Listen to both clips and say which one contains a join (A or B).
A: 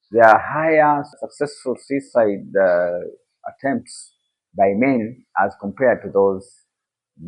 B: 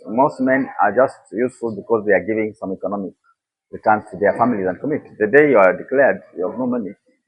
A